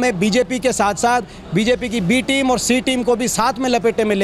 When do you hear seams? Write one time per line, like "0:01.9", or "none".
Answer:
none